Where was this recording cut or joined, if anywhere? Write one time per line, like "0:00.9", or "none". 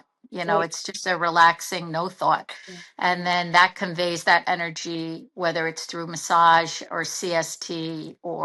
none

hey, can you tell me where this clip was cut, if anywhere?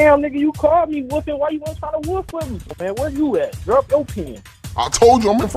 0:02.7

